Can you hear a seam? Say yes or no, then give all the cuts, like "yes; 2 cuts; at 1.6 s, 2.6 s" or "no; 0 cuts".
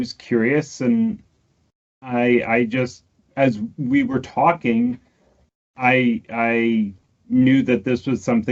no; 0 cuts